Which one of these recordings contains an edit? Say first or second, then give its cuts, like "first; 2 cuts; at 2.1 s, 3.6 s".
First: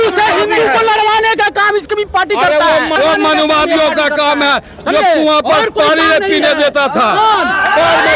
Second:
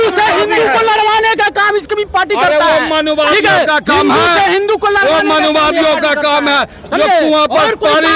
first; 1 cut; at 2.9 s